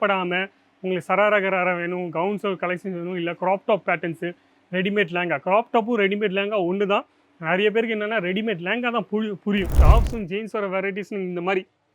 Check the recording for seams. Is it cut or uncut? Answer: cut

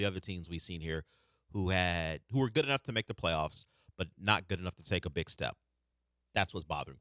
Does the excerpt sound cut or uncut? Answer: uncut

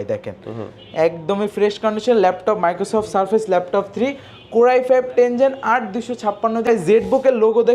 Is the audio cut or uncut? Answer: cut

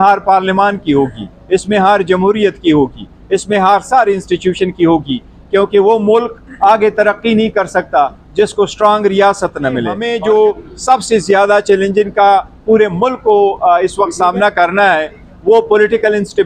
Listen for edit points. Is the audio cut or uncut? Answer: cut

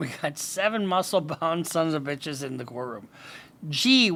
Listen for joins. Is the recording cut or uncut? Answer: uncut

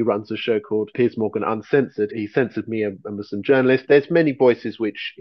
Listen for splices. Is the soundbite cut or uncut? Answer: cut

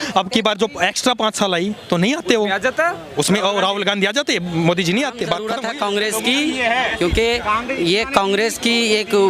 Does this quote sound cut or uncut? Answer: cut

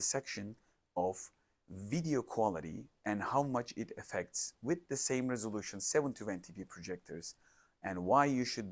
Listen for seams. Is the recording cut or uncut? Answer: uncut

